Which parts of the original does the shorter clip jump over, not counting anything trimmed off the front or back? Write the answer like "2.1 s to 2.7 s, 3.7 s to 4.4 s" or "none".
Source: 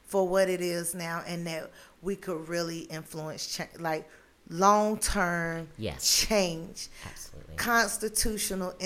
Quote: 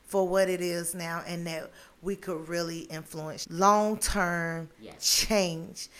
3.4 s to 4.4 s